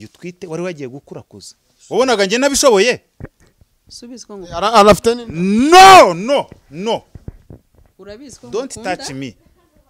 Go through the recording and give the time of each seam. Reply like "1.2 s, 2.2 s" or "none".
none

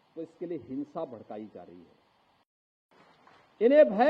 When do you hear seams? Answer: 2.8 s

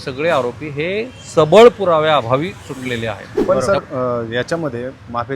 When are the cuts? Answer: 3.3 s

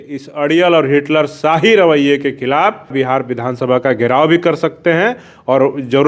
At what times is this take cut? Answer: 2.9 s

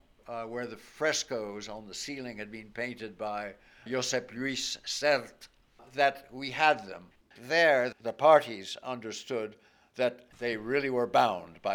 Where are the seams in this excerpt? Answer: 7.3 s, 10.3 s

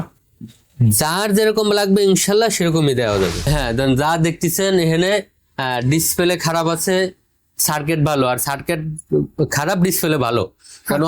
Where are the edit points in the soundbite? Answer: 3.5 s

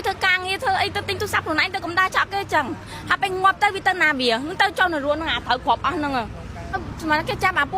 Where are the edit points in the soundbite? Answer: 6.6 s

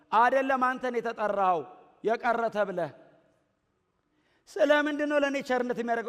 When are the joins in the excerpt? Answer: none

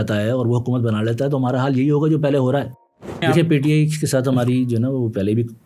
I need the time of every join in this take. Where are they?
3.2 s

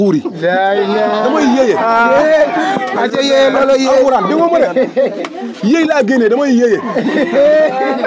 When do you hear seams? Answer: none

